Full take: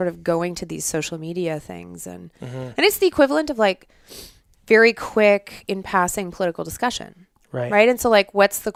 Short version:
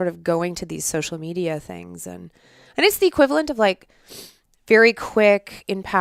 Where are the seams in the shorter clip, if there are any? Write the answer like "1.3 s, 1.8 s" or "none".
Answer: none